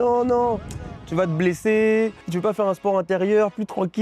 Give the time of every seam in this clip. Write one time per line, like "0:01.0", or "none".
0:02.2